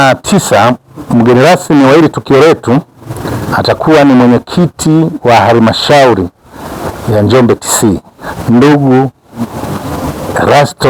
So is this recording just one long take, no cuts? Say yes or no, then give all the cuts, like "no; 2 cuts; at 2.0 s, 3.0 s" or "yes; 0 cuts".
yes; 0 cuts